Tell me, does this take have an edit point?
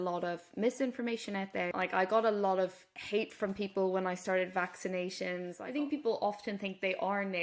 yes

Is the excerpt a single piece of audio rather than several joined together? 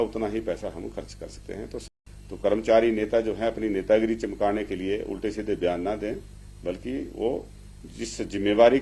no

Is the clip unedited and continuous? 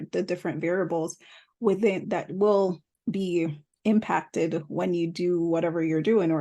no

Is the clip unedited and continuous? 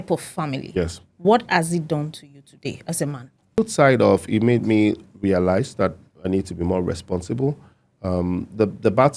no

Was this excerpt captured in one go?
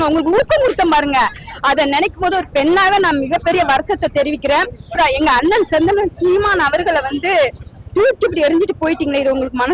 no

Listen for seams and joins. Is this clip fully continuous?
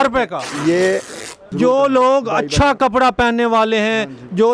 no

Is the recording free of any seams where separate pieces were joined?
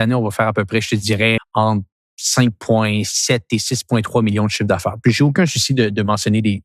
yes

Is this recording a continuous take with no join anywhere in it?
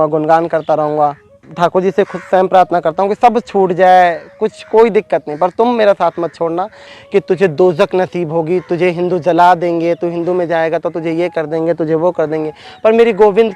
no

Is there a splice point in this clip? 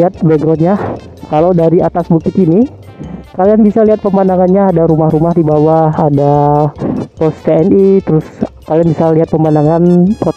no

